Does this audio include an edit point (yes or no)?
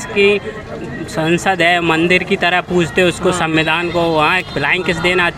no